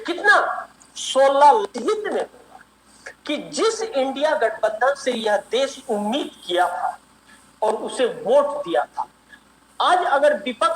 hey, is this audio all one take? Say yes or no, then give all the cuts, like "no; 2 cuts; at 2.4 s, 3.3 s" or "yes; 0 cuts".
no; 1 cut; at 1.6 s